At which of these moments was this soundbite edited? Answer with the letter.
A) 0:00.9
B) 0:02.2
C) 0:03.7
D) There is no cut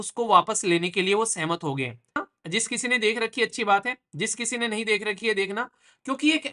B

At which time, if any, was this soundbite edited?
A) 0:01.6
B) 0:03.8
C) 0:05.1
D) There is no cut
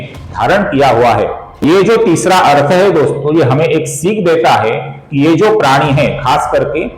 A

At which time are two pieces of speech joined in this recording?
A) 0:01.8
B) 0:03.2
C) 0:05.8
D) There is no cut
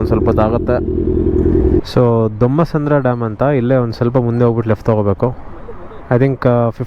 A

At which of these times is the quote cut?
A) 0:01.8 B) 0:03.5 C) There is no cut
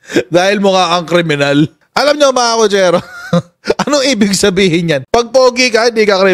A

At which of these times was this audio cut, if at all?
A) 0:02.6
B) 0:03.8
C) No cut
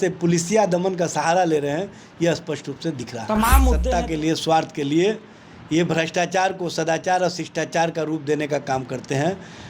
B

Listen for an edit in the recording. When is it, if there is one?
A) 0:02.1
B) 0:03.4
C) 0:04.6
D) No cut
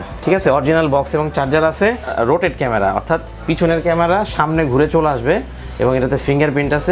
A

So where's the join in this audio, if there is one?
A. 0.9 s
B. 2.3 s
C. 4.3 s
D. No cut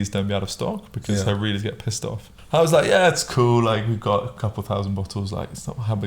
B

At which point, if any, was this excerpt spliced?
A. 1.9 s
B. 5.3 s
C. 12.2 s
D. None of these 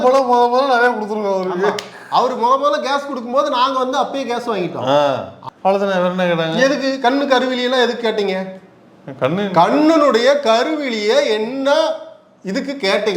B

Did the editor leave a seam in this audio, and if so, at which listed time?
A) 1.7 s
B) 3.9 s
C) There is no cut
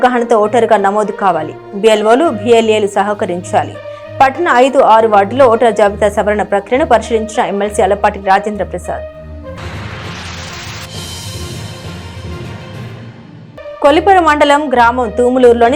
C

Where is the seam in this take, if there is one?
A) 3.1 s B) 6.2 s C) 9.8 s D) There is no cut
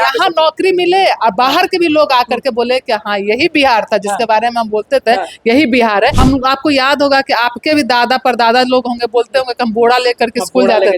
B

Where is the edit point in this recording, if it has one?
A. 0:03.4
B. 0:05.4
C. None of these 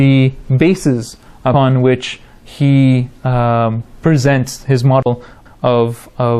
A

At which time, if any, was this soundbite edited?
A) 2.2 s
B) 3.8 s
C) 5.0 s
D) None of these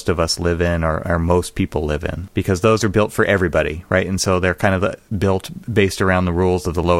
A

